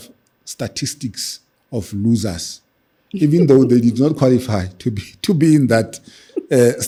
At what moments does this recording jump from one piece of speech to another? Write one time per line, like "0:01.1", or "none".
none